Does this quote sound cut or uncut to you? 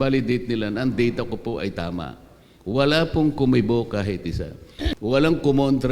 cut